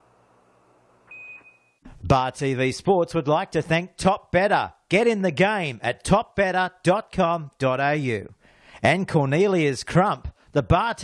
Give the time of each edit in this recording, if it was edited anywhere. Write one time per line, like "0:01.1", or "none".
0:01.5